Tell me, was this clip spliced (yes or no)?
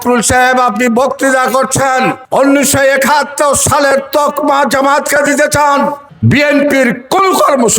yes